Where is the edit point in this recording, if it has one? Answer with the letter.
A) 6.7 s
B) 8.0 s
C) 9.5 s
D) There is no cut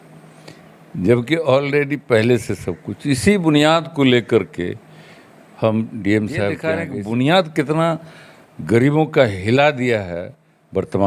A